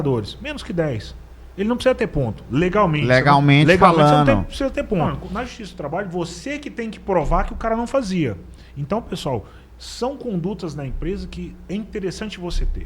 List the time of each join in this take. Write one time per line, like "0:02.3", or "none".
0:05.2